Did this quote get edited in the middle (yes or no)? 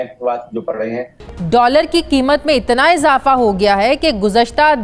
yes